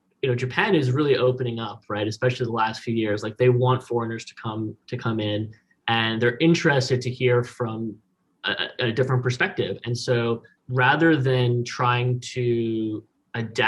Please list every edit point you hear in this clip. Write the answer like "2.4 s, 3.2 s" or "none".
none